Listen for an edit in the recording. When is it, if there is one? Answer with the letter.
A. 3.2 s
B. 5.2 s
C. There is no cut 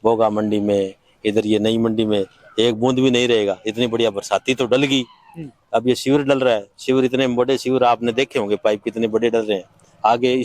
C